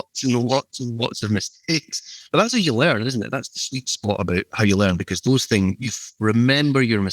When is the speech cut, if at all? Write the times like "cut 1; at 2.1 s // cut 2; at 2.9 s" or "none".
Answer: cut 1; at 5.9 s

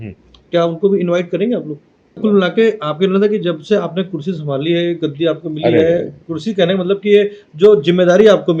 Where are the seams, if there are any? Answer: cut 1; at 2.2 s

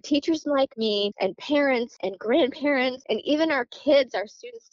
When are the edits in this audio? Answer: cut 1; at 1.1 s // cut 2; at 1.9 s // cut 3; at 3.0 s

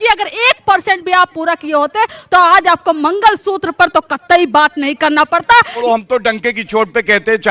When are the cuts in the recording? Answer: cut 1; at 5.8 s

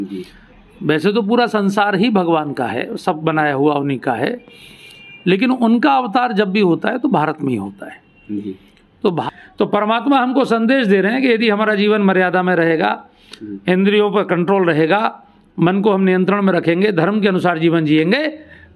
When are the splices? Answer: cut 1; at 9.2 s

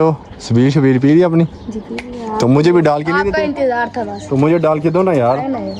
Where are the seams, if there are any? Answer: cut 1; at 4.4 s

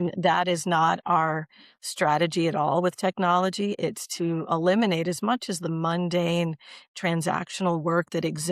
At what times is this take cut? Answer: none

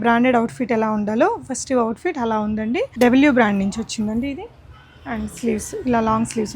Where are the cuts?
cut 1; at 2.9 s

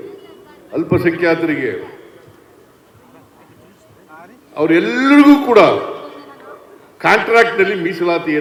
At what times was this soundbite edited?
none

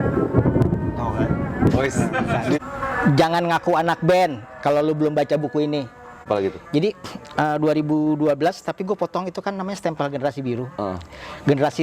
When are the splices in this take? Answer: cut 1; at 2.6 s // cut 2; at 6.1 s

